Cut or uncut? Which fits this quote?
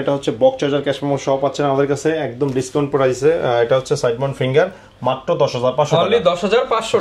uncut